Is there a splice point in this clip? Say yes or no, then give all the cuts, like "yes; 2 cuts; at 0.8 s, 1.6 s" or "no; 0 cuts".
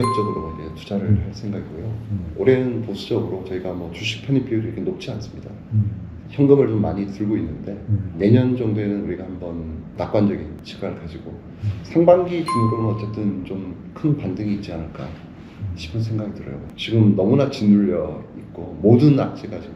yes; 4 cuts; at 8.1 s, 9.9 s, 10.6 s, 16.7 s